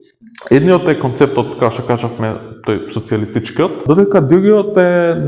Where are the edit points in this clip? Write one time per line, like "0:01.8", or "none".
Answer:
0:03.8